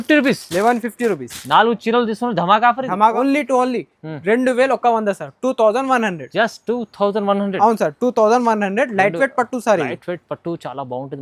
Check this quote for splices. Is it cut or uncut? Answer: cut